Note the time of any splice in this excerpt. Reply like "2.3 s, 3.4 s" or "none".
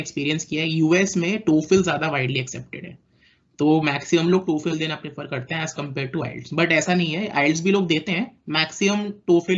none